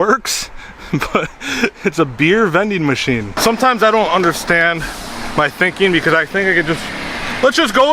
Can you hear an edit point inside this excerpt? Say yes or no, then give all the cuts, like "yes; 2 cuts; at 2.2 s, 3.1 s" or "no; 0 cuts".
yes; 1 cut; at 3.3 s